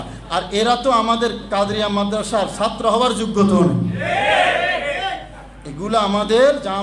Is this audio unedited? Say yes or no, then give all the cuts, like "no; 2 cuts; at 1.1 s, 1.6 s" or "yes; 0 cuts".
yes; 0 cuts